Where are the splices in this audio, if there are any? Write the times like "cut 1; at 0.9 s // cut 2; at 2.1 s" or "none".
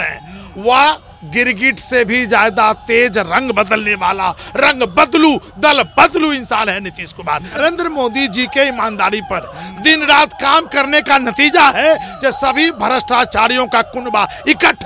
cut 1; at 7.6 s